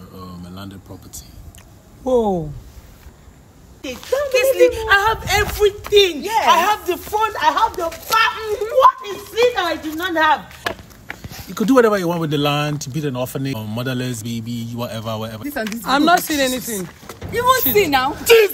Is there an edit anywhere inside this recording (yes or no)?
yes